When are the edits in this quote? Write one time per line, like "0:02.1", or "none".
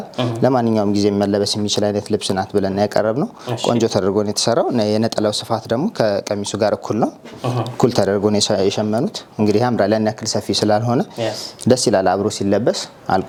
none